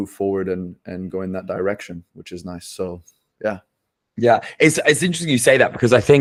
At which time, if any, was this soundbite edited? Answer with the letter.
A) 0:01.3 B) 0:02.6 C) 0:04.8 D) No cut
D